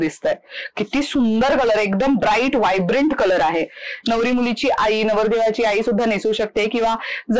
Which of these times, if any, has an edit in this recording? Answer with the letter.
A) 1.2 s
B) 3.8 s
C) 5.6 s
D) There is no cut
D